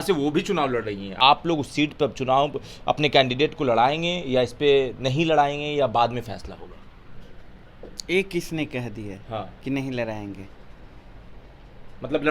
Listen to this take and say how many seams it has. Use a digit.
1